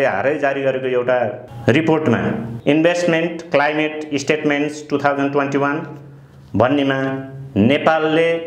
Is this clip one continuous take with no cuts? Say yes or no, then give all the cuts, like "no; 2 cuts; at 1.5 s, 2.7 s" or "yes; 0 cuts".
no; 2 cuts; at 1.5 s, 2.5 s